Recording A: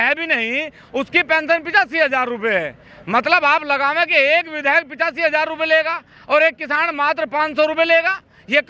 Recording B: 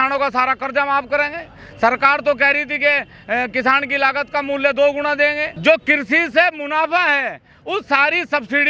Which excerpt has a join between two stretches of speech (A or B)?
B